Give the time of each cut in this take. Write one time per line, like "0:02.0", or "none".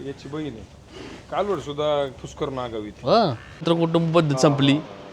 0:03.6

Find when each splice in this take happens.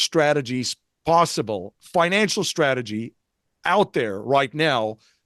0:01.8

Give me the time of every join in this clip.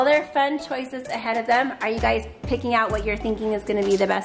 none

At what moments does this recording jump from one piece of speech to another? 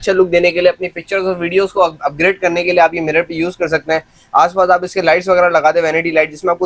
none

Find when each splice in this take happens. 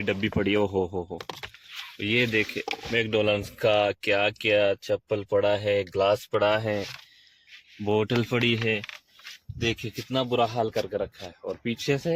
none

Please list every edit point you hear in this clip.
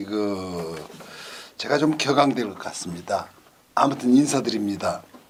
none

